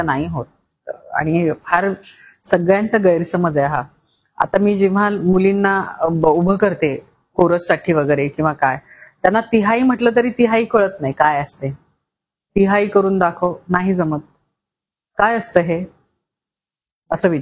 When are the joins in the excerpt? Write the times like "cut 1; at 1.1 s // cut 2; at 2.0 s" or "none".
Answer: none